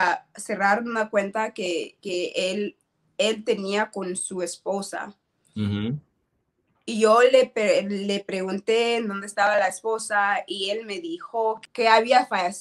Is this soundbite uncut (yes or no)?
no